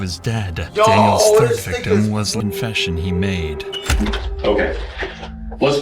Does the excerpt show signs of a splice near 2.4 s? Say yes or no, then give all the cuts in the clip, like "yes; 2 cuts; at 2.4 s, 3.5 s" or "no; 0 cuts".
yes; 1 cut; at 2.4 s